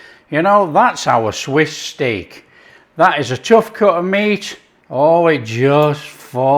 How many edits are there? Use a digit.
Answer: 1